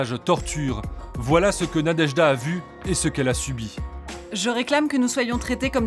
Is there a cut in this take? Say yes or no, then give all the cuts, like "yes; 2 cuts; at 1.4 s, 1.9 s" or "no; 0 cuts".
no; 0 cuts